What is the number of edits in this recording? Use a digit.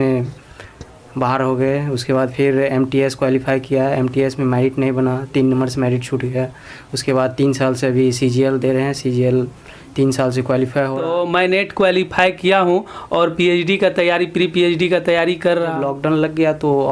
2